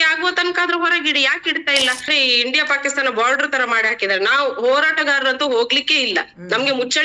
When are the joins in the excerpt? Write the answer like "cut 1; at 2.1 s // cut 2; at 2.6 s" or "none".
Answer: cut 1; at 2.1 s

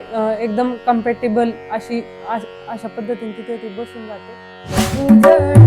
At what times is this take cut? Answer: cut 1; at 4.7 s

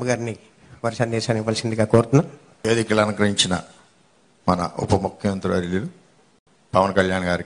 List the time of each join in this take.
cut 1; at 2.5 s

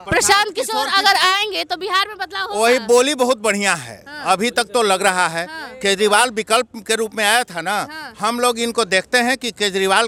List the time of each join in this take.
none

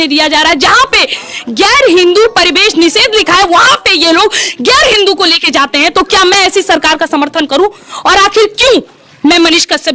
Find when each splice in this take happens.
none

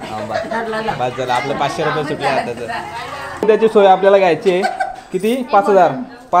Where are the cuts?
cut 1; at 3.5 s

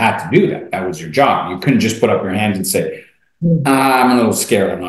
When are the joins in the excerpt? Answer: none

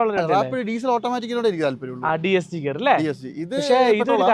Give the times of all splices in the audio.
none

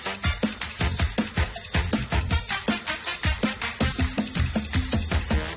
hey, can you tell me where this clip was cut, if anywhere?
none

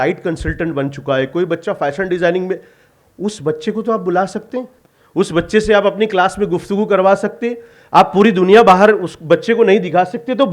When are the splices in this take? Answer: none

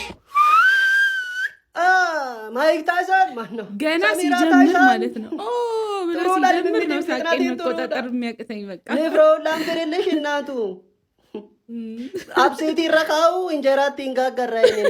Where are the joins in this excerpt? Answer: none

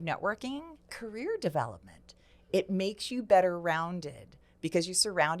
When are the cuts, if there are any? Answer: cut 1; at 1.0 s

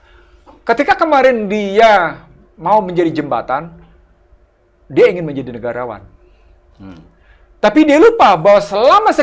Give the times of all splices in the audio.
none

